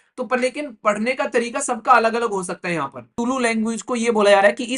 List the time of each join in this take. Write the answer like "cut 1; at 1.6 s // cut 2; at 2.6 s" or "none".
cut 1; at 3.1 s